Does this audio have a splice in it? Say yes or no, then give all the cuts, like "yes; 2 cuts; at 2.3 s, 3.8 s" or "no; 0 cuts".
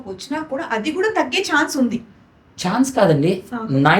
no; 0 cuts